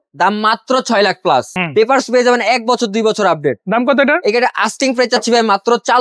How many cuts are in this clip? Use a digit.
1